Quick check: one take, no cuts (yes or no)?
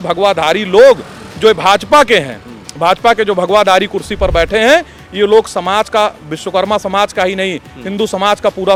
yes